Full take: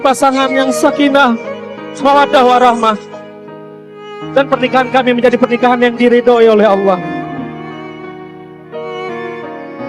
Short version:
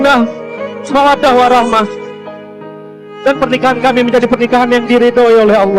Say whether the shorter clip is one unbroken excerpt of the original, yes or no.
yes